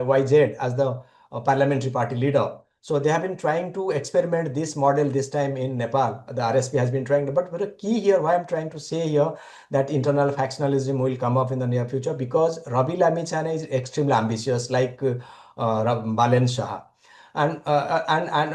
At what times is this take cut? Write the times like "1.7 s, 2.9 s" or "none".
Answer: none